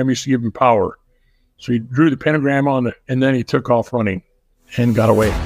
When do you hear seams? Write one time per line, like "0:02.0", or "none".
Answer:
0:03.0

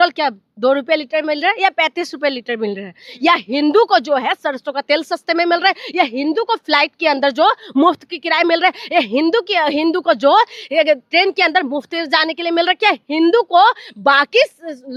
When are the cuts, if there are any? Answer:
none

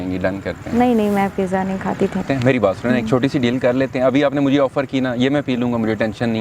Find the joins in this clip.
0:02.2

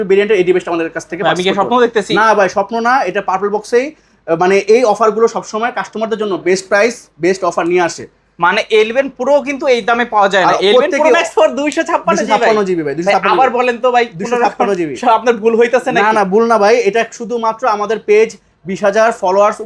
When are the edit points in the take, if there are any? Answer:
none

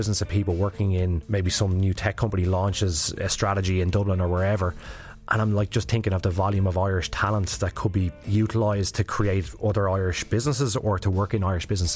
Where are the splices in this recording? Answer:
0:01.2
0:08.2

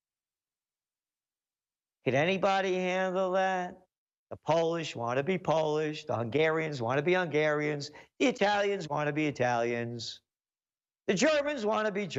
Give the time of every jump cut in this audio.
none

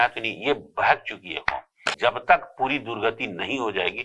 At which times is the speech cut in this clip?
0:01.9

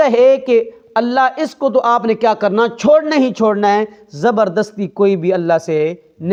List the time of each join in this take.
none

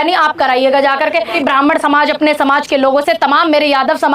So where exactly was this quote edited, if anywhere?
0:01.4

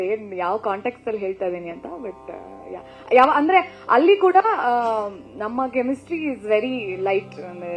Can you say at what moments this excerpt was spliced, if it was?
none

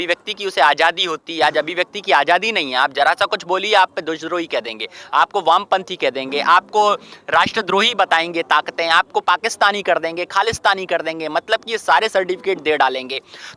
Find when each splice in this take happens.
none

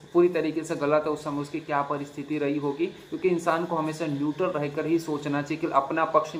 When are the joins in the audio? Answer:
none

